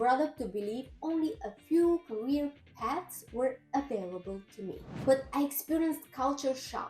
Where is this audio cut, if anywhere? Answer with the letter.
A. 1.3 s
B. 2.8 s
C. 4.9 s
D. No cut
C